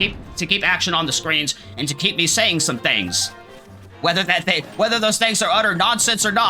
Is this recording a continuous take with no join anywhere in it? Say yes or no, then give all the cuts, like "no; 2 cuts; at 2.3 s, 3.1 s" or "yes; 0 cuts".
yes; 0 cuts